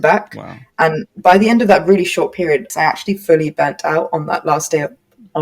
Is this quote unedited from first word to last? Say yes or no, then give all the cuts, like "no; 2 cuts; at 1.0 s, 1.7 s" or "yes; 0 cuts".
no; 1 cut; at 2.7 s